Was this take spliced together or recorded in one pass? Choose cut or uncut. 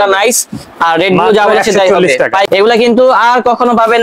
cut